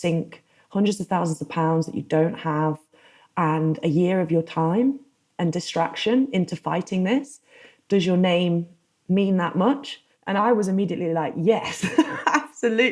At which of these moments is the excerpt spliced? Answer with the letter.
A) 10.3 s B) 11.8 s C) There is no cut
A